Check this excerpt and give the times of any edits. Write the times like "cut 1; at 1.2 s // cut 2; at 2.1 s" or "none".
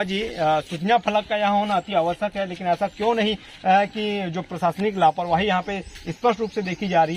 none

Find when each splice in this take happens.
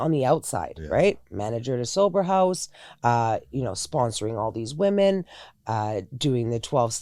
none

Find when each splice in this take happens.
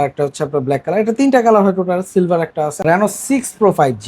cut 1; at 2.8 s

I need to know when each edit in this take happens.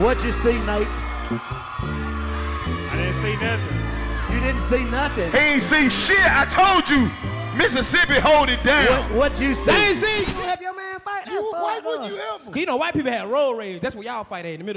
cut 1; at 10.2 s

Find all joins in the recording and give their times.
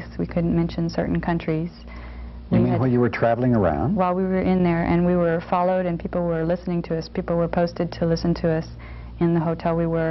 none

